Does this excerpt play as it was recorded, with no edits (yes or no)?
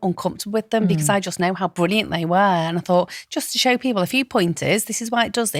yes